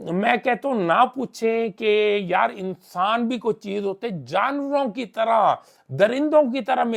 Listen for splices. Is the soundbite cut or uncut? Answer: uncut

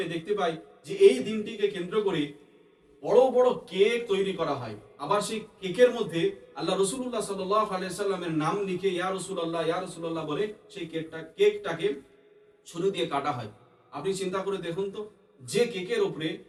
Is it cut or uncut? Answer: uncut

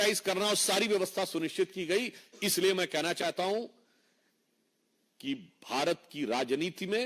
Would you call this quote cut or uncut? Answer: uncut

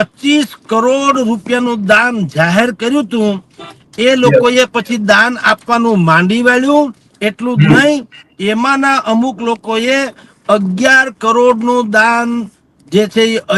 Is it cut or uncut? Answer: uncut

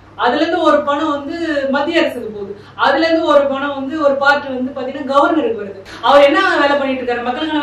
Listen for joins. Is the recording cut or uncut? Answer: cut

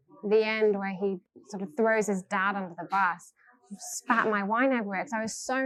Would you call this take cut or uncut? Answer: uncut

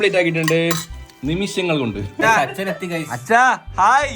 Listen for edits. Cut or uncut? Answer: cut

